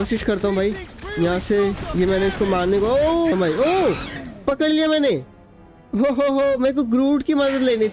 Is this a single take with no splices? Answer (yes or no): no